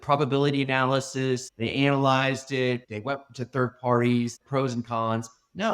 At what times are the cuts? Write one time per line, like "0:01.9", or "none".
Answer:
0:04.4